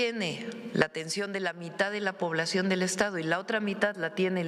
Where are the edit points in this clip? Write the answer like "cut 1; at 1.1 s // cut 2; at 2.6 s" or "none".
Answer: none